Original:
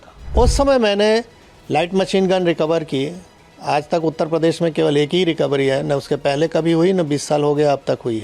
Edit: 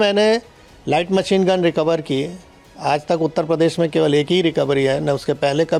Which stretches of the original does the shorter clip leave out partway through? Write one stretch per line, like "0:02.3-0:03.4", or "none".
none